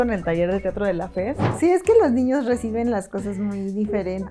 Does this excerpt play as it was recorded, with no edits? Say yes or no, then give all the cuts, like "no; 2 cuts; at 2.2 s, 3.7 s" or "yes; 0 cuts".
no; 1 cut; at 1.5 s